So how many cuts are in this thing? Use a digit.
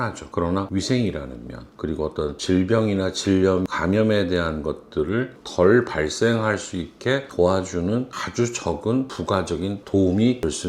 0